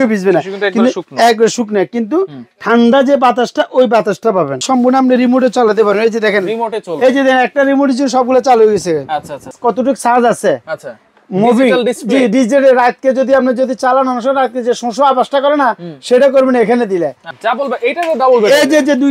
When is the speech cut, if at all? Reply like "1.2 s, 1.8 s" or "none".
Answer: 4.6 s, 9.4 s, 17.2 s